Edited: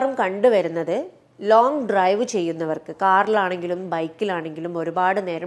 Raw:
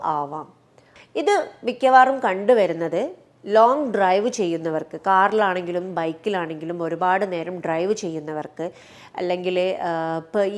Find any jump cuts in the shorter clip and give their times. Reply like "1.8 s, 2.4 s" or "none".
none